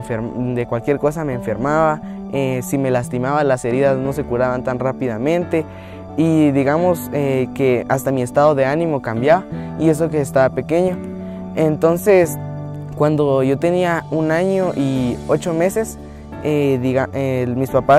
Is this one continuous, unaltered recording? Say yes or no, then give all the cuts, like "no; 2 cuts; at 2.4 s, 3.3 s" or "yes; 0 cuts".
no; 1 cut; at 2.3 s